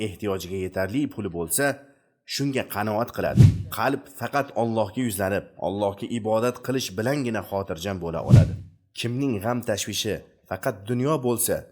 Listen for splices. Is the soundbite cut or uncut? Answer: cut